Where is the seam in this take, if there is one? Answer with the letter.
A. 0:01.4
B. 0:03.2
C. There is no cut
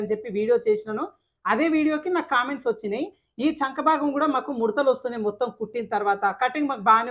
C